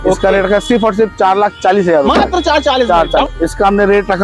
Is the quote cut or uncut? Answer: cut